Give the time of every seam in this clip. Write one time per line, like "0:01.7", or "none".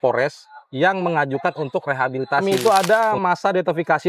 0:02.4